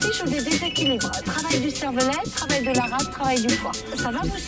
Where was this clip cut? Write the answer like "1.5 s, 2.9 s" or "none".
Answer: none